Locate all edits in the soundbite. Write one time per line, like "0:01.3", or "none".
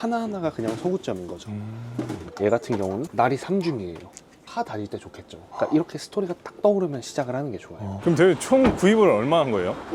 0:02.2
0:07.8